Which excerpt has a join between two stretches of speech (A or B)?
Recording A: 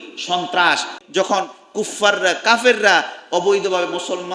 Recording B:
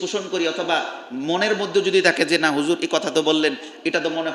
A